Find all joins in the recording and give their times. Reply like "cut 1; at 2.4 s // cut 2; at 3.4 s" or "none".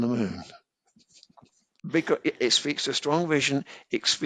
cut 1; at 1.4 s